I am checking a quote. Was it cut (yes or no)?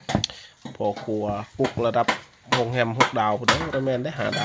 no